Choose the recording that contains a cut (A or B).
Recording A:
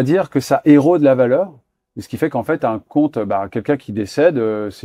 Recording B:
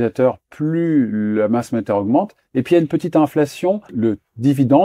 B